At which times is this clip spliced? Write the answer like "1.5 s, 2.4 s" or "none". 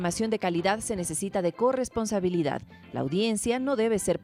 none